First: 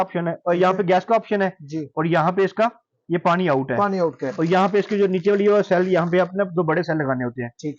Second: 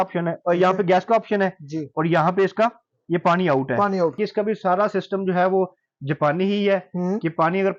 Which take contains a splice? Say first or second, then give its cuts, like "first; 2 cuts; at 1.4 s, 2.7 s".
second; 1 cut; at 4.1 s